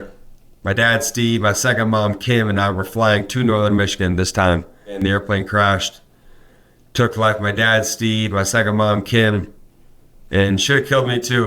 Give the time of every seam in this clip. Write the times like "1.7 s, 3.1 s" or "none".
5.0 s